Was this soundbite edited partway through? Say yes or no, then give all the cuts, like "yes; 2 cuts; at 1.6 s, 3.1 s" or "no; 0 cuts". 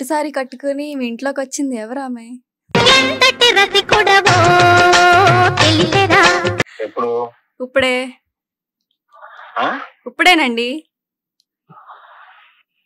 no; 0 cuts